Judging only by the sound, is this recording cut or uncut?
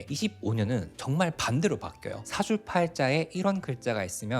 cut